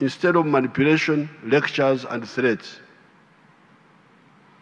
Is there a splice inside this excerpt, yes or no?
no